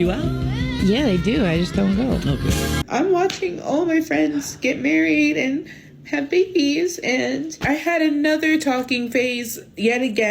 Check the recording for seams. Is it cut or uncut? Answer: cut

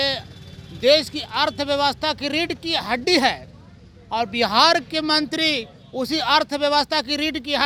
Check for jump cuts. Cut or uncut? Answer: uncut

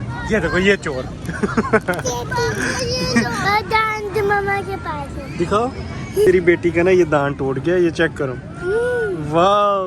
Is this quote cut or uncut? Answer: cut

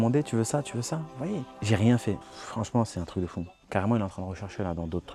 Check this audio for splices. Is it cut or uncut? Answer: uncut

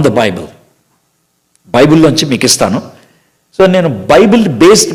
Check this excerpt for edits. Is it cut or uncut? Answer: uncut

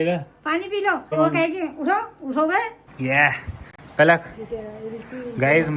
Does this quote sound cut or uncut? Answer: cut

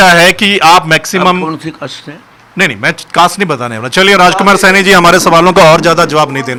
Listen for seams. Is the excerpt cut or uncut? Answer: uncut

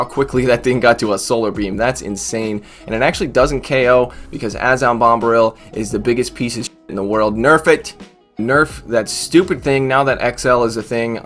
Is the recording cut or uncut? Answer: cut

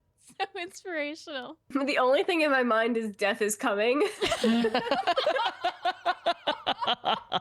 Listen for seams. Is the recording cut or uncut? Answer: cut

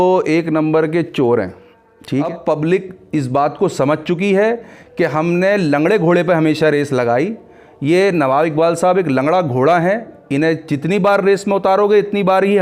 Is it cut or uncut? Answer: cut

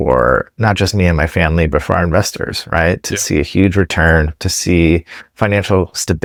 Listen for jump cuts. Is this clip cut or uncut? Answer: uncut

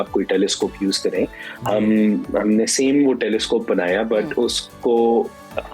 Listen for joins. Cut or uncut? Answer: uncut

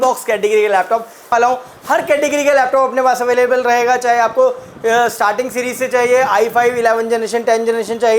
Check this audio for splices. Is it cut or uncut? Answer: cut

